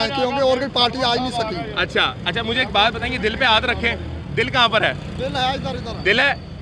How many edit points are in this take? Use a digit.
0